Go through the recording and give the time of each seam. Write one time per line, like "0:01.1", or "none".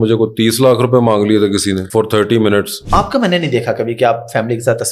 0:01.8
0:02.8